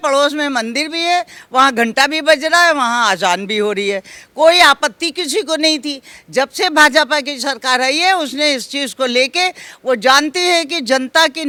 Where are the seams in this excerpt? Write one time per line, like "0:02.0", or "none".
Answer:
none